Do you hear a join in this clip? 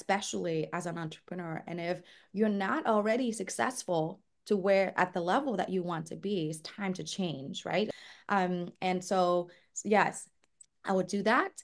yes; 1 cut; at 7.9 s

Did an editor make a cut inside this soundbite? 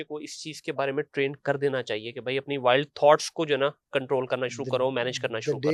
no; 0 cuts

